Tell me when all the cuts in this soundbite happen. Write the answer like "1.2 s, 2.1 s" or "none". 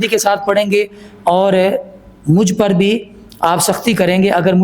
none